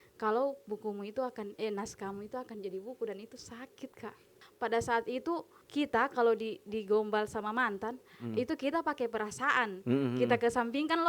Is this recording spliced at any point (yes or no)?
yes